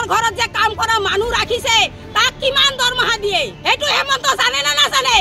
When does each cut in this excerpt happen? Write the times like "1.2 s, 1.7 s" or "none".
3.5 s